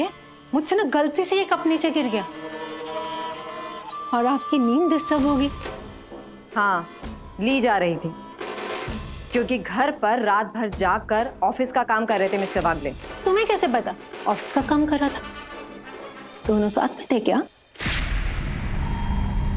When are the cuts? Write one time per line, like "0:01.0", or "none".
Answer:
0:05.6
0:14.0